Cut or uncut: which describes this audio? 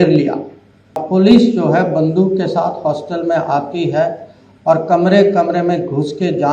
cut